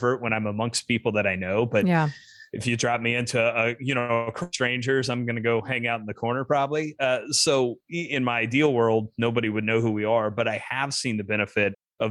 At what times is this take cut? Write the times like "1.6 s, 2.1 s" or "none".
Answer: none